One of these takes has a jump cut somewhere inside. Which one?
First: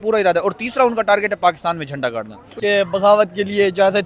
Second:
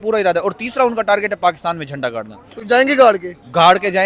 first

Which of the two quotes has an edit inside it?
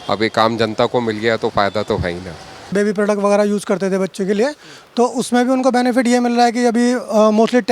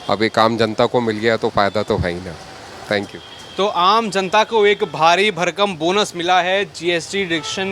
first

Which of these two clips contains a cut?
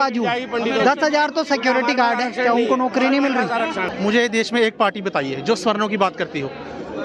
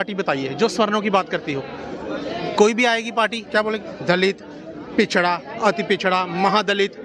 first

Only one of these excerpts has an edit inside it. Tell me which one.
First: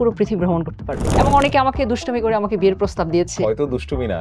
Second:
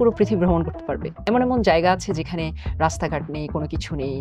first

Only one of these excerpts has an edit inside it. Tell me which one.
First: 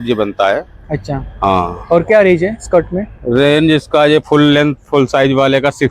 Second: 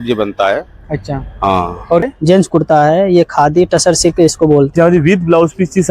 second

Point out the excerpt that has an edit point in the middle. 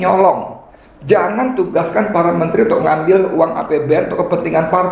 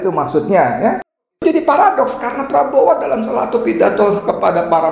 second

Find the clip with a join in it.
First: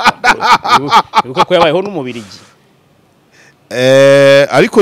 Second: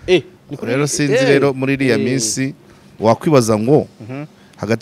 second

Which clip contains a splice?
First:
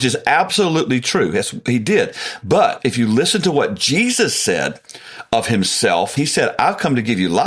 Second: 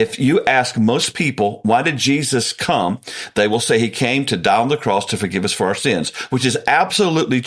first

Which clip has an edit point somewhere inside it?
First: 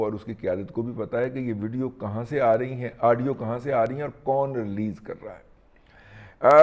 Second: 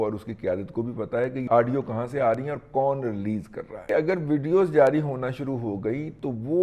second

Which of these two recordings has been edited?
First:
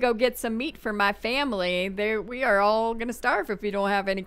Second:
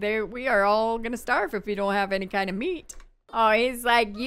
second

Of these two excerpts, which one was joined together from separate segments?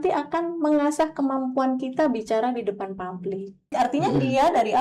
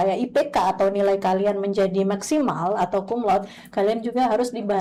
first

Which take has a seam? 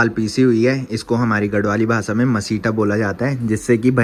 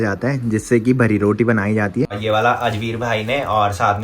second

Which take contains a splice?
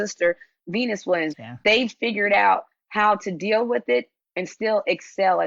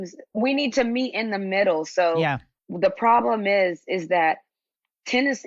first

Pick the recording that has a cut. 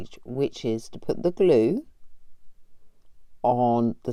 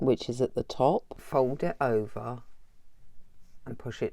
second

